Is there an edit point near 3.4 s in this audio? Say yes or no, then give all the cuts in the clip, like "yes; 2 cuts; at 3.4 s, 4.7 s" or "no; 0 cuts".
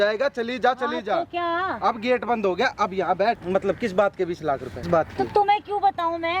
yes; 2 cuts; at 3.4 s, 4.9 s